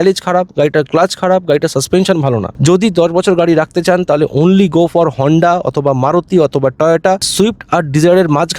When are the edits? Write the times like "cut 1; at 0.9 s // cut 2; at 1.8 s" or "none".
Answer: cut 1; at 2.5 s // cut 2; at 7.3 s